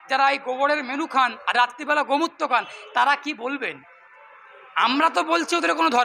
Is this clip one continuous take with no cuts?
yes; 0 cuts

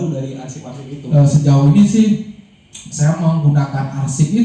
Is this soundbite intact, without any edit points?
no; 1 cut; at 1.0 s

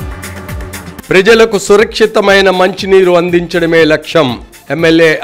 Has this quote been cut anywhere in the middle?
yes; 1 cut; at 0.9 s

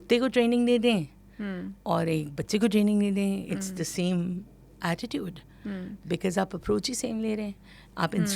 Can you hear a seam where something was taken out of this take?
no; 0 cuts

